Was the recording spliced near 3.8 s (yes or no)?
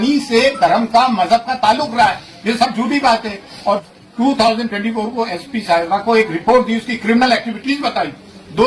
yes